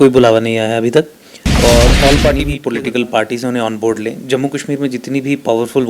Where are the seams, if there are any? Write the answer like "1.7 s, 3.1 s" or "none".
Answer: 2.4 s